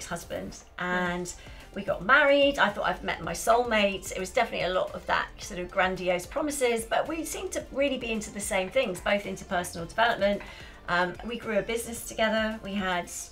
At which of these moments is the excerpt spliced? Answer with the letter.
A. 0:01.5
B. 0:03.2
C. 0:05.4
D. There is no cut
D